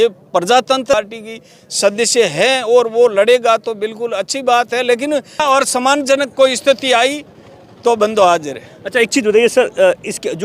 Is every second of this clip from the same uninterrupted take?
no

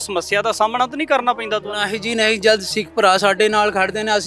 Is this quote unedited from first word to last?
yes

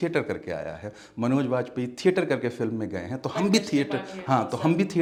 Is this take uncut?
yes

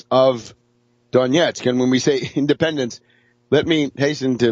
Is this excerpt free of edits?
no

